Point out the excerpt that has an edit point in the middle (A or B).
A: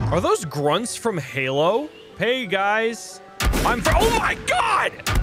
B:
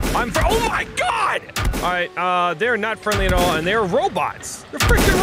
A